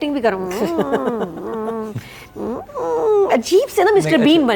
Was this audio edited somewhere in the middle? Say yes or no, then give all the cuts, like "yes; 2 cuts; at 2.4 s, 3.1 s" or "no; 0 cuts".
no; 0 cuts